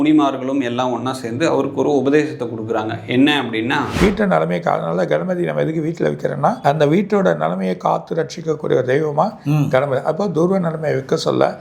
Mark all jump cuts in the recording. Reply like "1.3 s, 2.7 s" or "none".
4.0 s, 6.6 s